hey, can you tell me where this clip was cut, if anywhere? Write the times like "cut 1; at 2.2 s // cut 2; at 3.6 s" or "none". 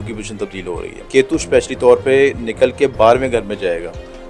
cut 1; at 1.1 s